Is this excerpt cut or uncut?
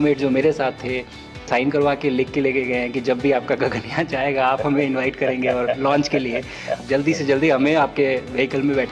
cut